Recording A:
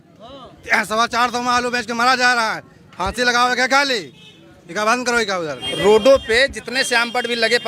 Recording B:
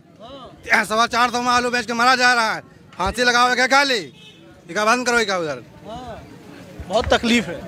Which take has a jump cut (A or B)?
A